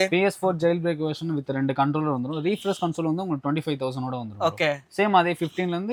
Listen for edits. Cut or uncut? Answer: uncut